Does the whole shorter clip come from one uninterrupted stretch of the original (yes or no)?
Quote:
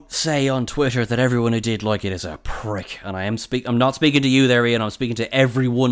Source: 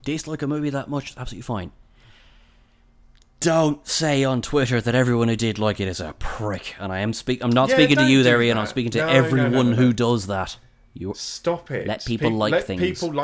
yes